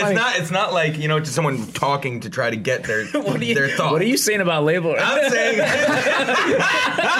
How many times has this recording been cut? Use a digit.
0